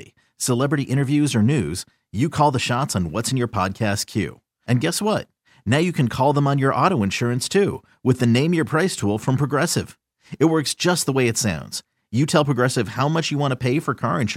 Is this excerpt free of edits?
yes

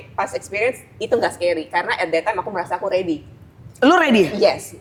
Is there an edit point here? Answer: no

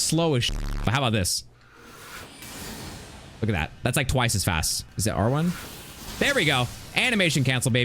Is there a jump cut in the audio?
yes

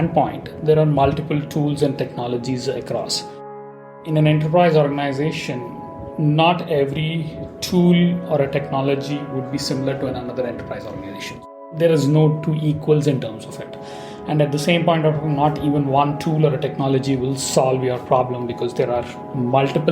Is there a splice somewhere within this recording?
yes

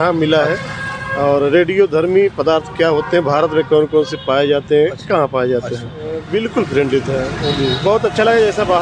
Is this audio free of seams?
no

